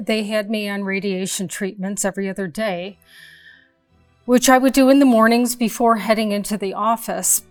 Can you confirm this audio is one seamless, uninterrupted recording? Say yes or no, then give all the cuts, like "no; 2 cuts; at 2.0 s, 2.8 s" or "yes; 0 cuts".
yes; 0 cuts